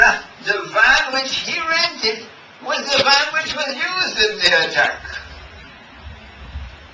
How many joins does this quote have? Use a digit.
1